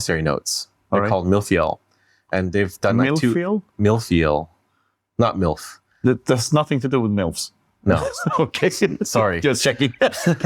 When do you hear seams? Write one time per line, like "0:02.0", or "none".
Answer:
none

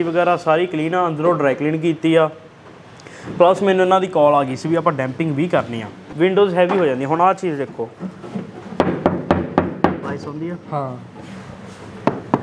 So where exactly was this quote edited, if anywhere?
0:06.1

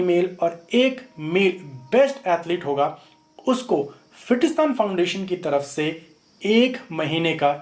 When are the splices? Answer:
none

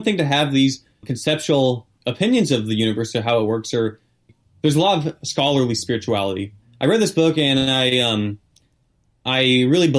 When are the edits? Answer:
0:01.1
0:01.9
0:04.3
0:06.6

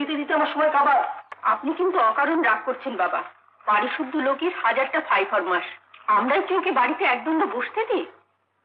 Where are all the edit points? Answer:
0:01.3

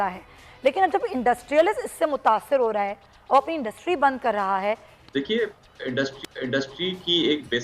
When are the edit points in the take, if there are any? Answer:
0:04.9

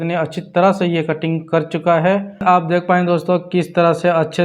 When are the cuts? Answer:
0:02.4

